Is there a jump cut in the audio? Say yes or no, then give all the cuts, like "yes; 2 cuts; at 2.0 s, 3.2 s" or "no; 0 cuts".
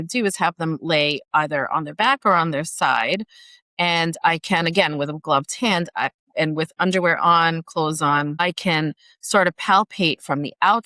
no; 0 cuts